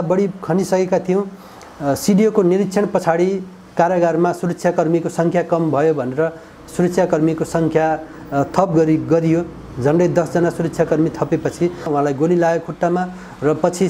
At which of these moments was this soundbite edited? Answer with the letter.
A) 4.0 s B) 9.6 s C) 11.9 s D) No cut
C